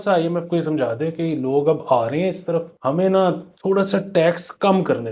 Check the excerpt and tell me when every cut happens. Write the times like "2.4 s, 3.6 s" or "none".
2.7 s, 3.5 s